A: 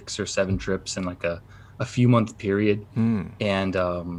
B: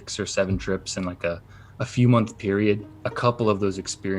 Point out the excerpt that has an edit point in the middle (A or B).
B